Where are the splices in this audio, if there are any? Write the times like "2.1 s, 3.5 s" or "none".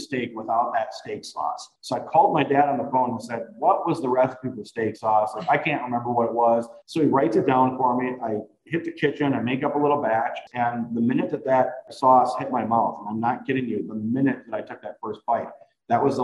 1.7 s, 6.8 s, 10.4 s, 11.9 s